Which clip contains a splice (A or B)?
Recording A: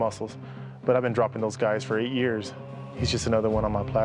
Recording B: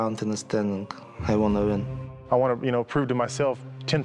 B